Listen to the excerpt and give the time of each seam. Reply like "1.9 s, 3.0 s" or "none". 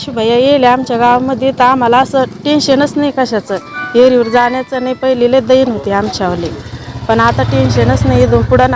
none